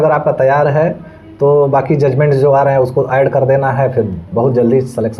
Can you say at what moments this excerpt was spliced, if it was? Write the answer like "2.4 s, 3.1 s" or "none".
none